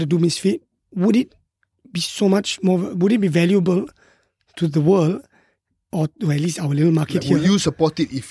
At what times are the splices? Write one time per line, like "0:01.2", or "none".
none